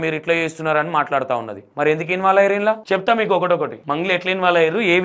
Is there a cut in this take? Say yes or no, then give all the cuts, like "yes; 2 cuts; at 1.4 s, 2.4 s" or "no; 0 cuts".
yes; 3 cuts; at 1.6 s, 2.8 s, 3.8 s